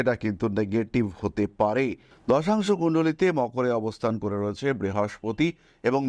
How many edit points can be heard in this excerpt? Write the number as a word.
one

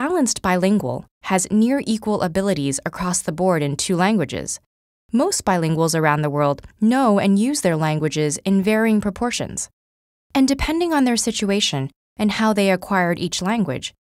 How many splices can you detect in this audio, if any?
one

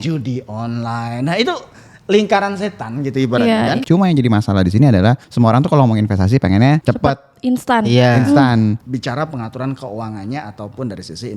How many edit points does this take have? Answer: four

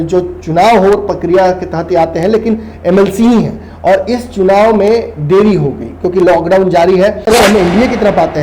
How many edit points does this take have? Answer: one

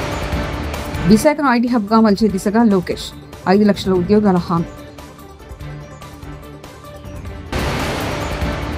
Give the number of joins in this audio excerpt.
one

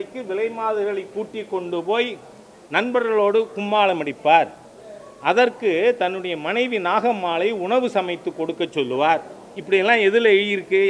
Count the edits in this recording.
zero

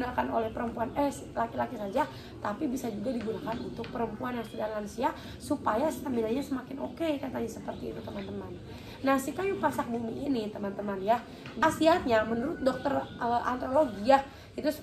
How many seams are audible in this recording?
one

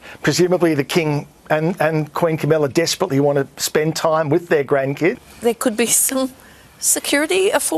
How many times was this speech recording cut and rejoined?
one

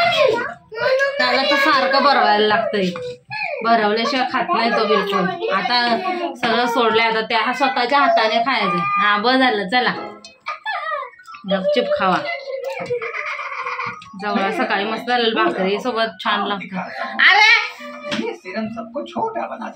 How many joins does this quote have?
zero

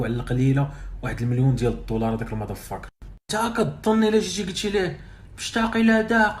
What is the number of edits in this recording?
one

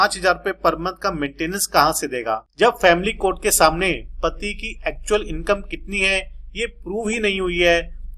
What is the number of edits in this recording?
one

